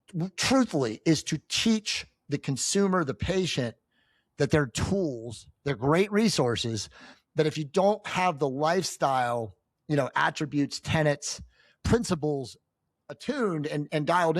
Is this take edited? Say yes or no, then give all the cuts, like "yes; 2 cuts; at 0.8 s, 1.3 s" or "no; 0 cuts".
no; 0 cuts